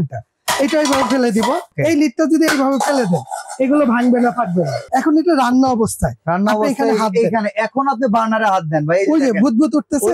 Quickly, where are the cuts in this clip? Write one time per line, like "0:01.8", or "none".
0:01.7
0:04.8